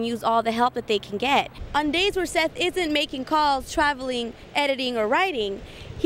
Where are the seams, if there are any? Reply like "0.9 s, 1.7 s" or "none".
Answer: 1.6 s